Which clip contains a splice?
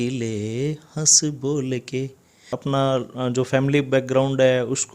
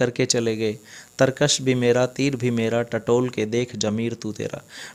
first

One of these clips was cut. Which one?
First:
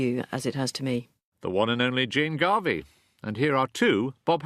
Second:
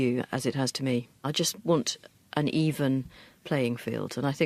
first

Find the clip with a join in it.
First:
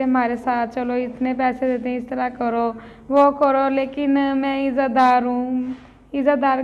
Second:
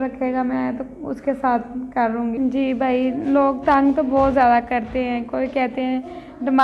second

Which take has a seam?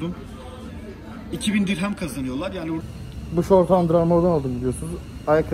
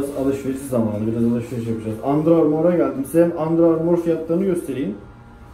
first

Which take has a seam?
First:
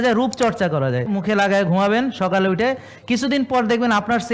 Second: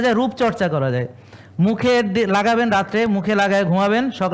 first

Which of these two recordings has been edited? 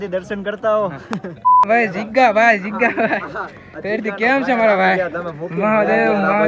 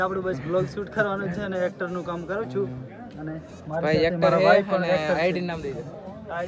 first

